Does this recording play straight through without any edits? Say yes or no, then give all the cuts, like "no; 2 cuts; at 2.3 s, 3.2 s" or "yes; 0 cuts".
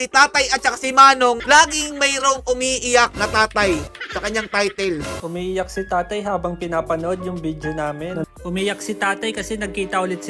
yes; 0 cuts